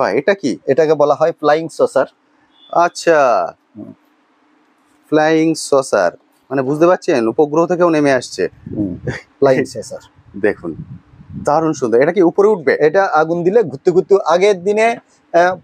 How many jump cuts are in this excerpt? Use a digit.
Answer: 0